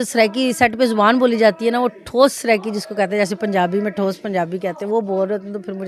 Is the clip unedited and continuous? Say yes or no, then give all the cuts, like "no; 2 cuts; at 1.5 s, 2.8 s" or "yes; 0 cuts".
yes; 0 cuts